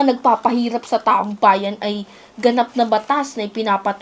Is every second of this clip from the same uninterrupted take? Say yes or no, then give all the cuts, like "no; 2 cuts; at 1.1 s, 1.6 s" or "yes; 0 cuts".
yes; 0 cuts